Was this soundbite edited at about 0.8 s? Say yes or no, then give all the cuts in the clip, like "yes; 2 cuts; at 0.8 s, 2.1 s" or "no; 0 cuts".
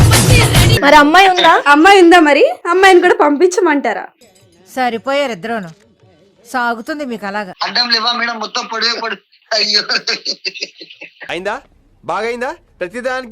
yes; 2 cuts; at 0.8 s, 7.5 s